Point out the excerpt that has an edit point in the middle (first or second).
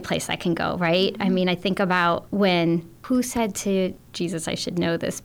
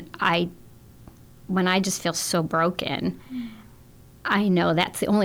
first